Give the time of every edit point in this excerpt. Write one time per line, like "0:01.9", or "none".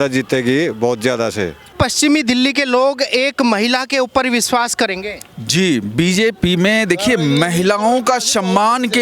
0:01.6